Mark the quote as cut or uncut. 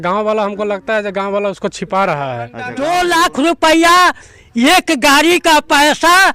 cut